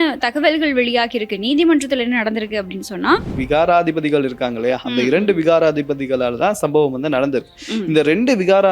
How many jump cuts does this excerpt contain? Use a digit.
1